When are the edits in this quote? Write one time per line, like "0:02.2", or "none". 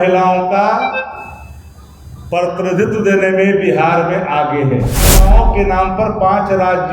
0:05.2